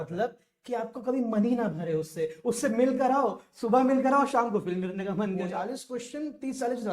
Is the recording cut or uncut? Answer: cut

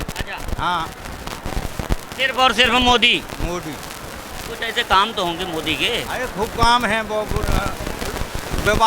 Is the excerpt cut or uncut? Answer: uncut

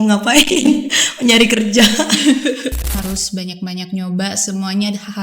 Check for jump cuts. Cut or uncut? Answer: cut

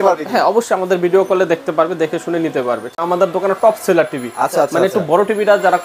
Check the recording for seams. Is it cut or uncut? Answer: cut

